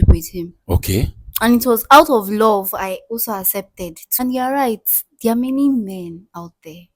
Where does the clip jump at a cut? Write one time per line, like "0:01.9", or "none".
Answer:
0:04.2